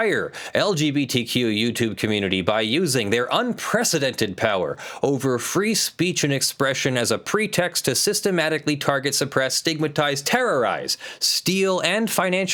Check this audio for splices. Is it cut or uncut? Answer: uncut